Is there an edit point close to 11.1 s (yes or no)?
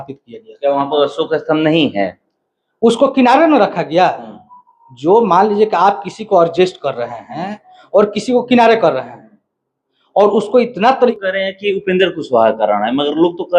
yes